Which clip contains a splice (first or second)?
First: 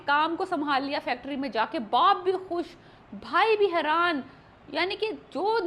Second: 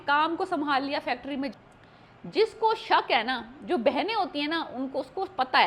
second